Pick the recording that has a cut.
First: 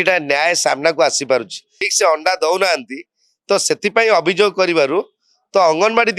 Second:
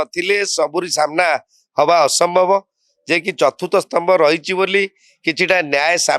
first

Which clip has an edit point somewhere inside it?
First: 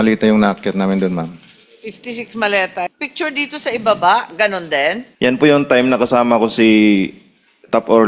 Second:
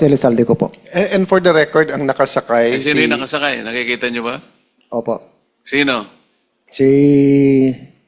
first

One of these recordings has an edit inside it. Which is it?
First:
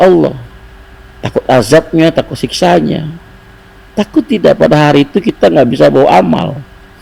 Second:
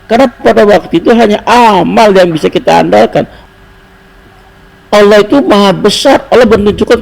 second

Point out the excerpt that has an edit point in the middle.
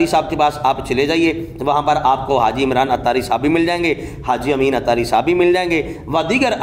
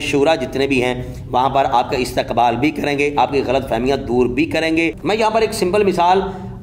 second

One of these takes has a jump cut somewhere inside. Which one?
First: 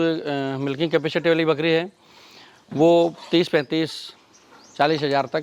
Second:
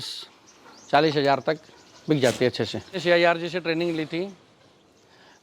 second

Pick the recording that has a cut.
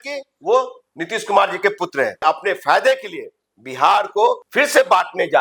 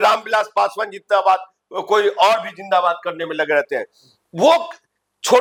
first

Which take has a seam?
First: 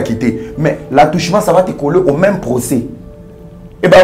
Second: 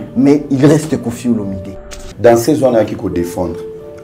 second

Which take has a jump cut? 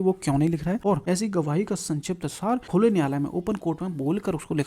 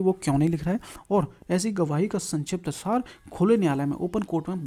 first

